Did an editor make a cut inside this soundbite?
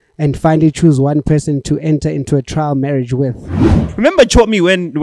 yes; 1 cut; at 3.8 s

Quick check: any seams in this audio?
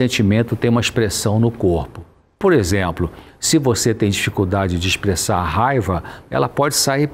no; 0 cuts

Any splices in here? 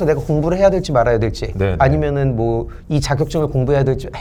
no; 0 cuts

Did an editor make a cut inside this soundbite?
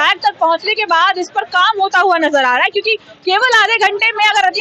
no; 0 cuts

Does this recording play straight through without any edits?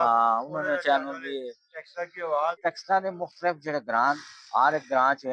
no; 1 cut; at 2.6 s

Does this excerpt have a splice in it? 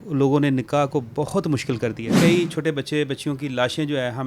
yes; 1 cut; at 2.1 s

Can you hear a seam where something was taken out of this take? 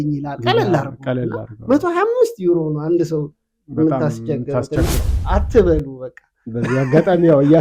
yes; 1 cut; at 5.0 s

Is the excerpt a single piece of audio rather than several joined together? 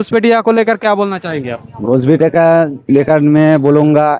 yes; 0 cuts

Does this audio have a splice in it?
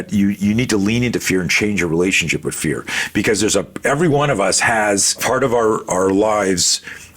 yes; 1 cut; at 5.1 s

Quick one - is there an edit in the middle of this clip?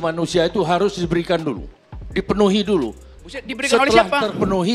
no; 0 cuts

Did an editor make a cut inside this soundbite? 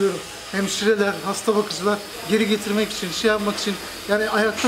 yes; 1 cut; at 2.1 s

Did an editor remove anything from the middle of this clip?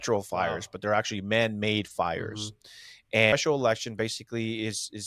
yes; 1 cut; at 3.3 s

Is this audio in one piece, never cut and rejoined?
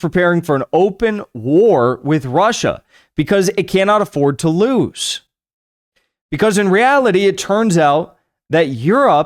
yes; 0 cuts

